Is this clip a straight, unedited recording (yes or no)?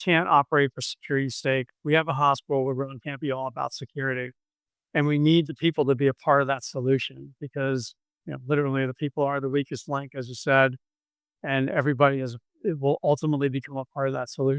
no